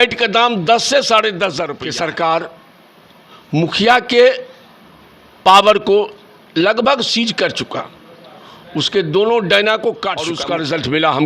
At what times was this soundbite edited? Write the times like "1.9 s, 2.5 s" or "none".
1.8 s, 10.4 s